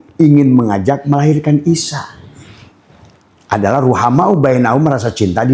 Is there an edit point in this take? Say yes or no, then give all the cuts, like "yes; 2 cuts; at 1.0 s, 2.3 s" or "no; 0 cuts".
no; 0 cuts